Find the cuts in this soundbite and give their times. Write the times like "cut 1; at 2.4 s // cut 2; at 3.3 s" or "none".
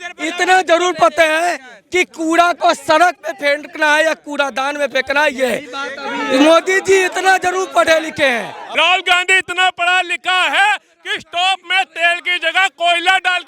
cut 1; at 8.6 s